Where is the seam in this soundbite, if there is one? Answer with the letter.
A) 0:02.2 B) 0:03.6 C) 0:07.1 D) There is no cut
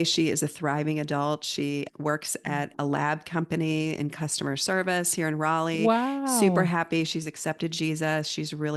D